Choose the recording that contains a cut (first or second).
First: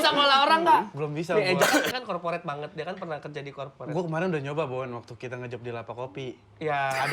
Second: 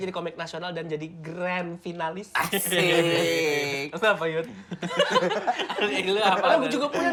first